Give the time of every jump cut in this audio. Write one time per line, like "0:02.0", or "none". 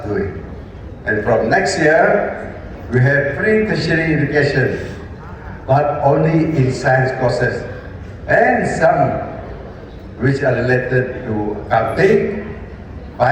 none